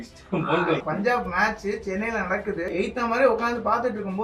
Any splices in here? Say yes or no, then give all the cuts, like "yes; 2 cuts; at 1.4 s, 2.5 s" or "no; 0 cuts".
yes; 2 cuts; at 0.8 s, 2.7 s